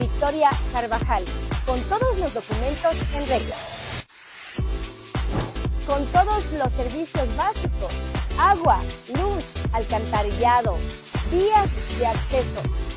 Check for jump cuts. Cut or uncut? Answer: uncut